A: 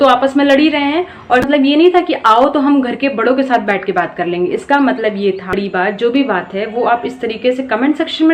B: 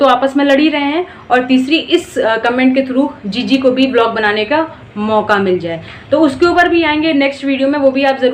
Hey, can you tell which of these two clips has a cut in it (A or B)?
A